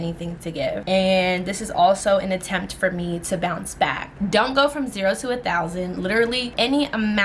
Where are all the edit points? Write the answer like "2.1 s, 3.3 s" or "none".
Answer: 4.1 s, 6.5 s